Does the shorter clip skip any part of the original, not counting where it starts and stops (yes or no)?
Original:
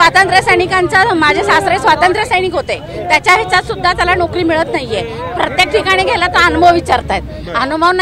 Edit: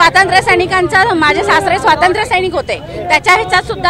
no